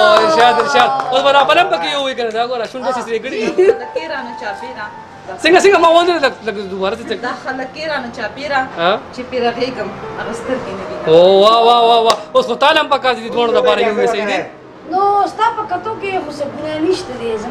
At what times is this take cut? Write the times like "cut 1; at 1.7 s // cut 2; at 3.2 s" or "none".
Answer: none